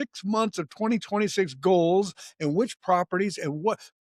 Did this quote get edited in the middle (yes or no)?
no